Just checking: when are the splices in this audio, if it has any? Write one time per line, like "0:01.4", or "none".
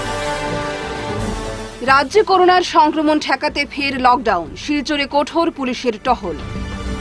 none